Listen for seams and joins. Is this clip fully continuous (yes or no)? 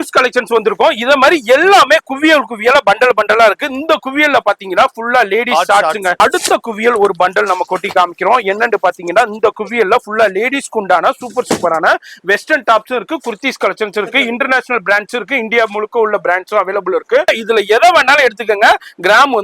no